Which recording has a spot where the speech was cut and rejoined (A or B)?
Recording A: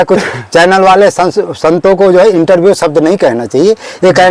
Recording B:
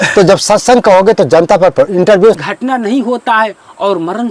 B